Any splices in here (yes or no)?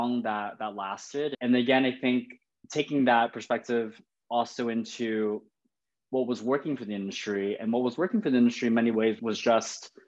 yes